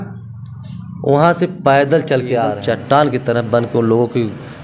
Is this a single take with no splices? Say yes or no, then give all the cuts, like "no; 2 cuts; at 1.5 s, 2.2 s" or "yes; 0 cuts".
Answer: no; 1 cut; at 2.6 s